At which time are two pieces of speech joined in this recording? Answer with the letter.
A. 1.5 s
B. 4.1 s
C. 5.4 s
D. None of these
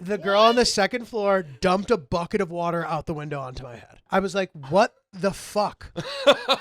B